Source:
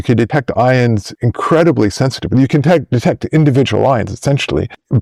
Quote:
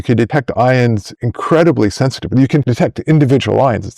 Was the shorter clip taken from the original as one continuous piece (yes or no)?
no